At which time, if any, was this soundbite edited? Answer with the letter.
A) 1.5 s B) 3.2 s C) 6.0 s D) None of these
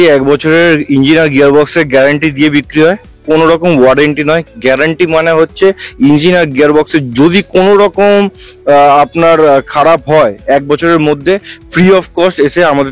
D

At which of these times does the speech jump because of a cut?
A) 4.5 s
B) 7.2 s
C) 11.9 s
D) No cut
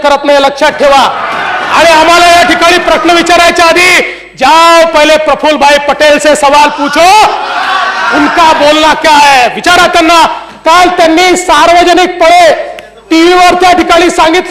B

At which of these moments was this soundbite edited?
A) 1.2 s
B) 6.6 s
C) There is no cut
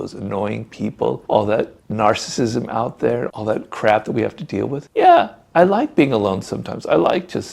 A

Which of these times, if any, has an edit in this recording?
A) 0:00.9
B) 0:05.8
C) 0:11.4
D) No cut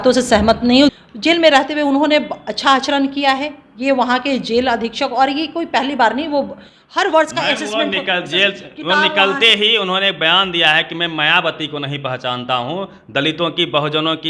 A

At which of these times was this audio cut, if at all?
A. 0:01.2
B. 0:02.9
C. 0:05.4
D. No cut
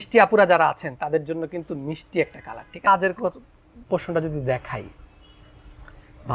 B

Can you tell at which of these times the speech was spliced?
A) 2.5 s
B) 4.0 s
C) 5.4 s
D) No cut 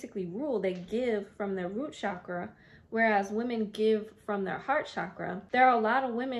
C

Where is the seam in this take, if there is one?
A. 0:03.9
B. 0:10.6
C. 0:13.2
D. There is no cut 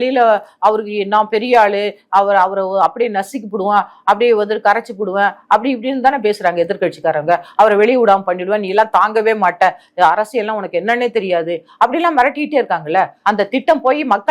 C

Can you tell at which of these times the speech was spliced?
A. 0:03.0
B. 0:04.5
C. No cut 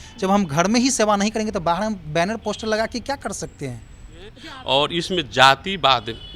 B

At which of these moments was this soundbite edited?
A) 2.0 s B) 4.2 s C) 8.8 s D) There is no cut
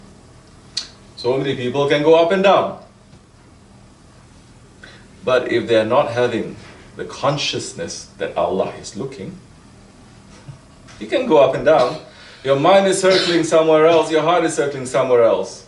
A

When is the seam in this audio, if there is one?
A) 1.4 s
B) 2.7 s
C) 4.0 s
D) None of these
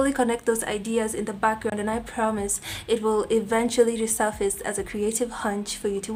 D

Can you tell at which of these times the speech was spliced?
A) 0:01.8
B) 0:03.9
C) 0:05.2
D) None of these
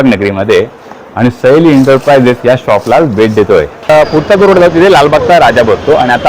B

